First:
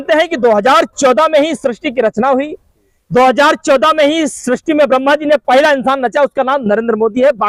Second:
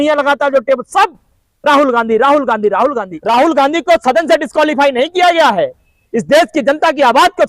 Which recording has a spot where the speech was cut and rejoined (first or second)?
second